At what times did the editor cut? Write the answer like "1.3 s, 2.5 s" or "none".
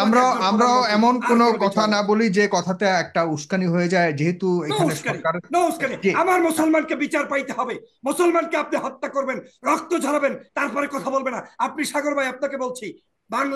none